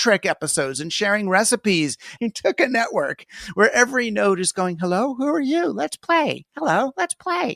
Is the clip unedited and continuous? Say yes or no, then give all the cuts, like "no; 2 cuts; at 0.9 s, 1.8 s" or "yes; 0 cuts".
no; 1 cut; at 2.1 s